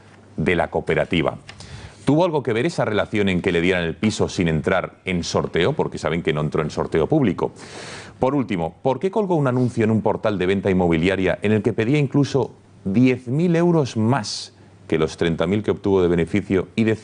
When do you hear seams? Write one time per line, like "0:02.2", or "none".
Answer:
0:11.5